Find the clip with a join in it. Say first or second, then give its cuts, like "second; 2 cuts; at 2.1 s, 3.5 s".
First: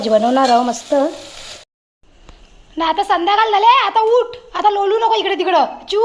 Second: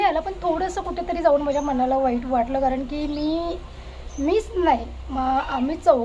first; 1 cut; at 1.6 s